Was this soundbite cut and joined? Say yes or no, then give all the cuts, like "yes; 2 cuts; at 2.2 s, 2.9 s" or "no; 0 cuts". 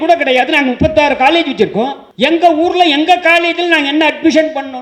yes; 1 cut; at 2.0 s